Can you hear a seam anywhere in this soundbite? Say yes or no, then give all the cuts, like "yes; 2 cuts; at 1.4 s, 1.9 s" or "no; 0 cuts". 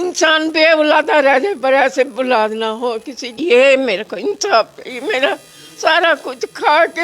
yes; 1 cut; at 3.4 s